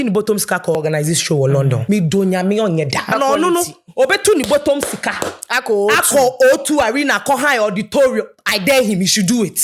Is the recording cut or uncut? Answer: cut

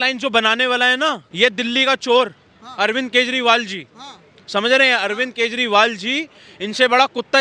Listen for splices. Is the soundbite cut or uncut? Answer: cut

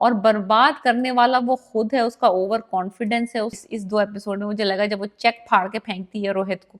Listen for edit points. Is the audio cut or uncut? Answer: cut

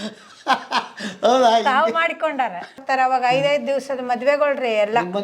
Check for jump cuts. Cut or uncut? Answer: cut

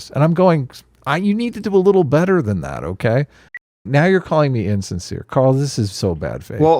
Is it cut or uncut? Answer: cut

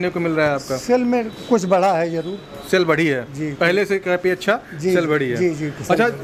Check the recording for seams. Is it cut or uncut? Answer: uncut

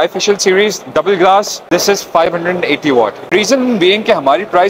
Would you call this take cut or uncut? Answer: cut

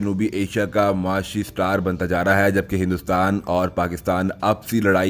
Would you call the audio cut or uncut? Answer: uncut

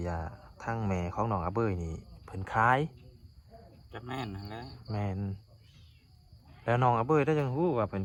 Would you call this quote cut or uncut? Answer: uncut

